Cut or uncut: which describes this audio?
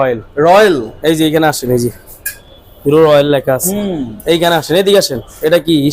uncut